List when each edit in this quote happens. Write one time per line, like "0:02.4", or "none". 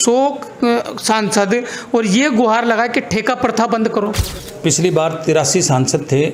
0:04.5